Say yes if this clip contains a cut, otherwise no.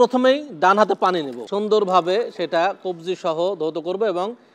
yes